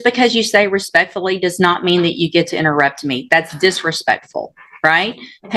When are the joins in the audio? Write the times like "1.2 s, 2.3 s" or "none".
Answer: none